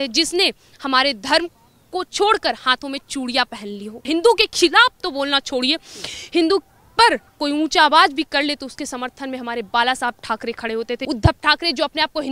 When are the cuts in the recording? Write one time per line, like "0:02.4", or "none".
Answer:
0:04.0
0:11.0